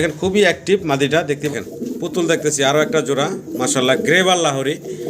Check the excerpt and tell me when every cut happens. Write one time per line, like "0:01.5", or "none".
0:01.5